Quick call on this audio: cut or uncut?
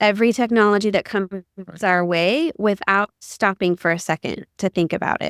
uncut